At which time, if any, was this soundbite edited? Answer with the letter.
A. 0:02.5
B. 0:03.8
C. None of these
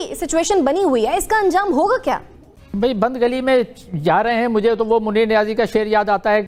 C